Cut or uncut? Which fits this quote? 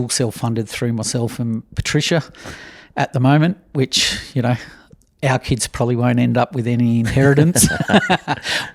uncut